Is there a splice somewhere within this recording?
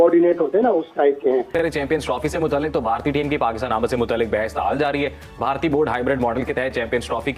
no; 0 cuts

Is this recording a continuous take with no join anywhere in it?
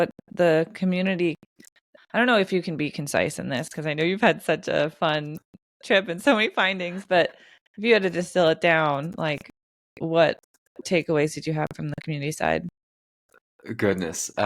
no; 1 cut; at 10.8 s

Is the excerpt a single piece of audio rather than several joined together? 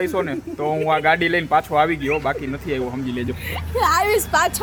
yes; 0 cuts

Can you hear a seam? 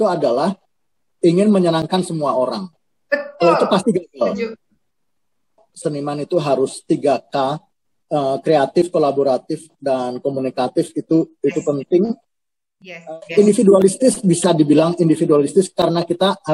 yes; 2 cuts; at 5.7 s, 13.1 s

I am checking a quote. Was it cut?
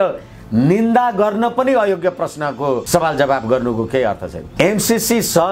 yes; 2 cuts; at 2.8 s, 4.4 s

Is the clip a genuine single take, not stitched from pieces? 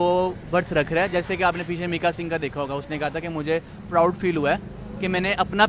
yes; 0 cuts

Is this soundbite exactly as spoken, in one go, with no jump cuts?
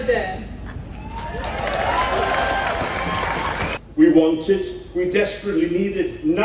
no; 1 cut; at 3.8 s

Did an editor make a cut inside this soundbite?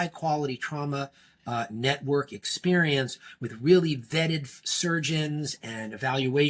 no; 0 cuts

